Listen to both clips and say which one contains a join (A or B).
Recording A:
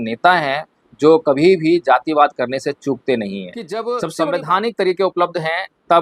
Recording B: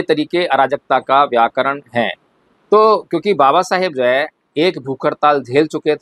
A